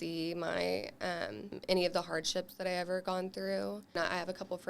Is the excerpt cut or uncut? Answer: cut